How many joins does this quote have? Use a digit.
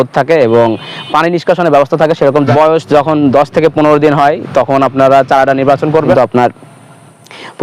2